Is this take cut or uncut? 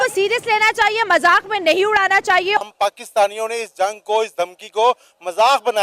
cut